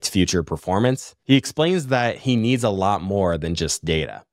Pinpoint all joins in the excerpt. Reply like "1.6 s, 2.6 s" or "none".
1.1 s